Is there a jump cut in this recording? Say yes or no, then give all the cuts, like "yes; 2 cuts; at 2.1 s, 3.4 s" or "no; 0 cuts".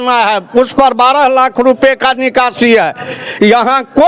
yes; 1 cut; at 3.2 s